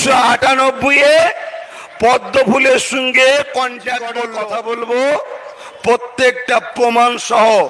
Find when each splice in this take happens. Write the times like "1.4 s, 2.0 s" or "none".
4.2 s